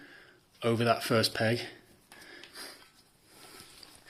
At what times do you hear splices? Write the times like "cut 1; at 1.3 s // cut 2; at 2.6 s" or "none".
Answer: none